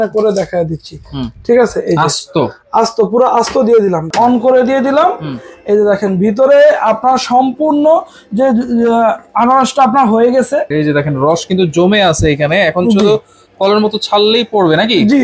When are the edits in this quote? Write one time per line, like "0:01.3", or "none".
0:04.1
0:10.7